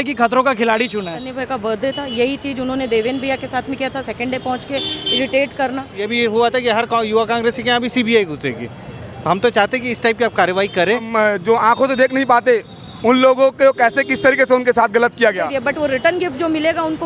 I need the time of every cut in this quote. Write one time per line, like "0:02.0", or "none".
0:01.3
0:06.0
0:11.1
0:15.5